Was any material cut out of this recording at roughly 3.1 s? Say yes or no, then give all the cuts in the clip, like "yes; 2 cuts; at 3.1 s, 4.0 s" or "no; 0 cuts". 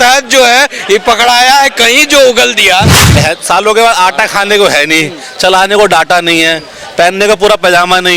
yes; 1 cut; at 3.1 s